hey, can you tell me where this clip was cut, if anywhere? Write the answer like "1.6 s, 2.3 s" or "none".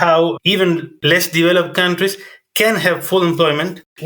1.0 s